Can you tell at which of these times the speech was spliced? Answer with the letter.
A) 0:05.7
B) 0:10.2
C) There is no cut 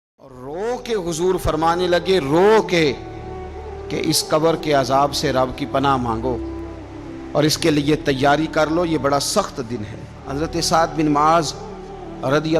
B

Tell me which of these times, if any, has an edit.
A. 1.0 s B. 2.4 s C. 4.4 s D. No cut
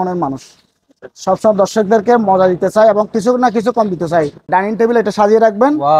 C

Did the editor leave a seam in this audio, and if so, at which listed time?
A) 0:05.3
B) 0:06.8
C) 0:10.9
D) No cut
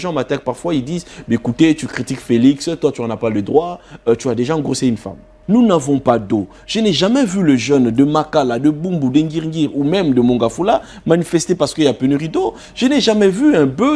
A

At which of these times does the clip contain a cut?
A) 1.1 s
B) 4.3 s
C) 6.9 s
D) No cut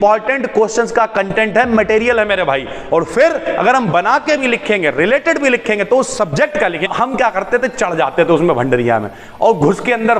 C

